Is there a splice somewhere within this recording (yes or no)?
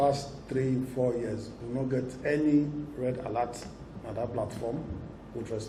no